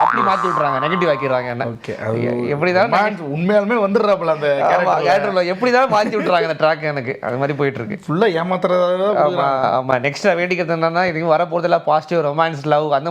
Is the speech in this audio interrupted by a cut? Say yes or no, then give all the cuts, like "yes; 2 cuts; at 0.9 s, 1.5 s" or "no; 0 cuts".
no; 0 cuts